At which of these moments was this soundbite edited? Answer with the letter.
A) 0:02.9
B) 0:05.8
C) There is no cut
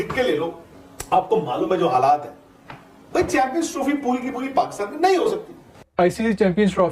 B